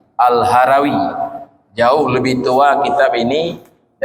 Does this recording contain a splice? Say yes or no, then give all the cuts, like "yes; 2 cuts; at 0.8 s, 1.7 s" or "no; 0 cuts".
no; 0 cuts